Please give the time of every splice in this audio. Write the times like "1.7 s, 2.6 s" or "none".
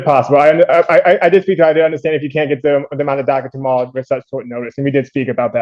none